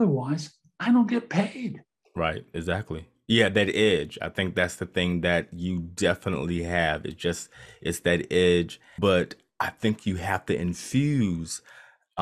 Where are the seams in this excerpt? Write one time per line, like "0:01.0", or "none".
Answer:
0:08.8